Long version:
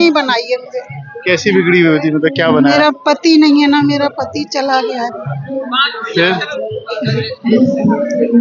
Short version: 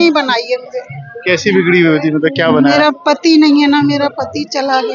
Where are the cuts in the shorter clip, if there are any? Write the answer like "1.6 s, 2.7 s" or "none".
none